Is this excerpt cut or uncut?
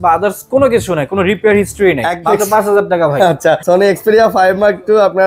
cut